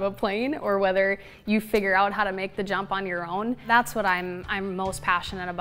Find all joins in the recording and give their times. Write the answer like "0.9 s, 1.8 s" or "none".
3.6 s